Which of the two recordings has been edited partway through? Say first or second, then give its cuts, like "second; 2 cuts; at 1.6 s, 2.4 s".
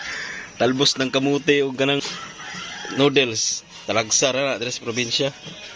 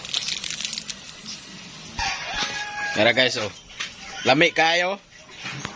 first; 1 cut; at 2.0 s